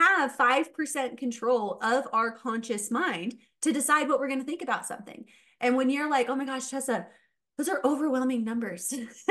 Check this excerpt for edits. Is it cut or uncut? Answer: uncut